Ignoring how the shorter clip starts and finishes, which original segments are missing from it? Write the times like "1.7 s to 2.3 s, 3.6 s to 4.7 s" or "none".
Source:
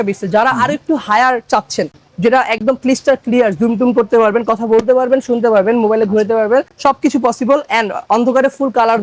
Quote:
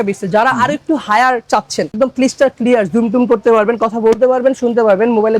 1.9 s to 2.6 s